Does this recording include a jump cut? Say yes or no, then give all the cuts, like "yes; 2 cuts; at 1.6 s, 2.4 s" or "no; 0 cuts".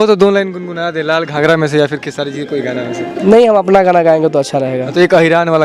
no; 0 cuts